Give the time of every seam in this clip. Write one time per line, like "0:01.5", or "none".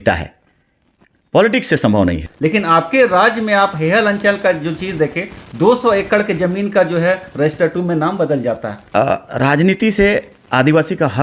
0:02.3
0:08.7